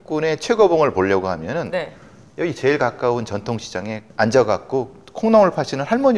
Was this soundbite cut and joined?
no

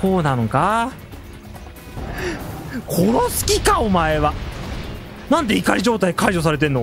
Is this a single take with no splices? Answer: no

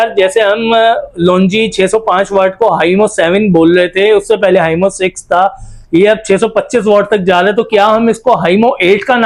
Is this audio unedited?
yes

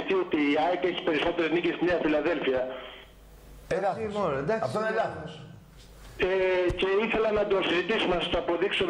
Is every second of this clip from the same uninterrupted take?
no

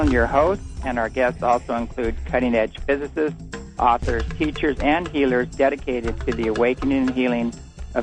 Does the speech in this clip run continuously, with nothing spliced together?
yes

